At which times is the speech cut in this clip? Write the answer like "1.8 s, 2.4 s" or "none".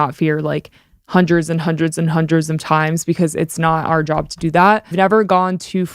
4.9 s